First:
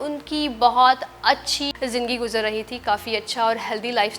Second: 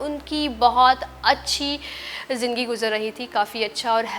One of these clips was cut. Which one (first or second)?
first